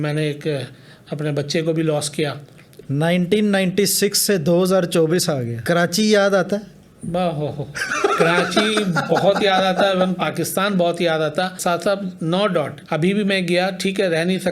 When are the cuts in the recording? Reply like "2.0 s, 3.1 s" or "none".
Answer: 2.6 s, 11.6 s, 12.8 s

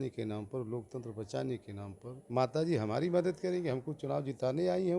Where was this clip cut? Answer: 2.1 s

